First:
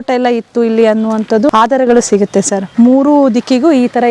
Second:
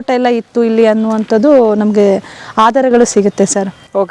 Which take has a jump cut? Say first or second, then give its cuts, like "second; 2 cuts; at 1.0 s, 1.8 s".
first; 2 cuts; at 1.5 s, 2.7 s